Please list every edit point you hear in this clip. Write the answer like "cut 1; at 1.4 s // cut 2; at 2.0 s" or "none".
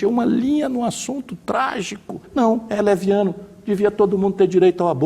cut 1; at 2.2 s